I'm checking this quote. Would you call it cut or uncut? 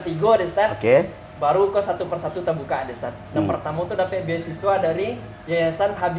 uncut